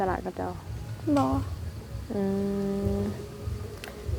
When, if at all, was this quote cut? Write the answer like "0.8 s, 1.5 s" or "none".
none